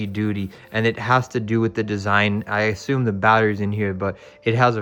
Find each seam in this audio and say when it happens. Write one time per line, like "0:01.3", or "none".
none